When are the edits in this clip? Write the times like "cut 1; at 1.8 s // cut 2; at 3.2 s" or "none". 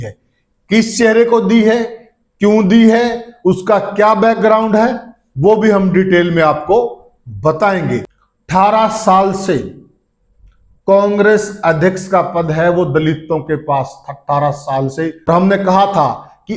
cut 1; at 8.2 s // cut 2; at 15.3 s